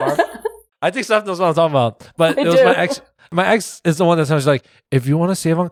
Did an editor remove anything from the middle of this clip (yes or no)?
no